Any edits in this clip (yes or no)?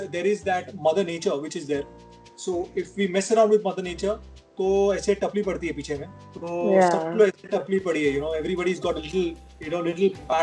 no